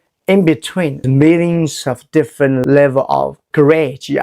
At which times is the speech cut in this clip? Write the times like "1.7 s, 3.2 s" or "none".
1.0 s, 2.6 s, 3.5 s